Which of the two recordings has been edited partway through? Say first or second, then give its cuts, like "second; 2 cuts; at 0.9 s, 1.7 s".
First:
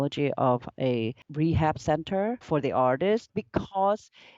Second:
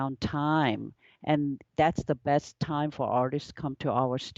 first; 3 cuts; at 1.2 s, 2.4 s, 3.3 s